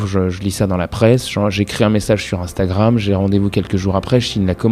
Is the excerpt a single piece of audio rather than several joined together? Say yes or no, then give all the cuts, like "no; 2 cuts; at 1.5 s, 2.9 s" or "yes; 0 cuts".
yes; 0 cuts